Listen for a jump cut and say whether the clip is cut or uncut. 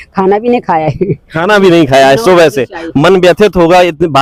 uncut